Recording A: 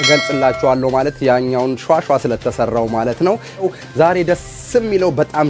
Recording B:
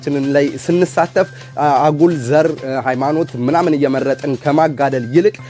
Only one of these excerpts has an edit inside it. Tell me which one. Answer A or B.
A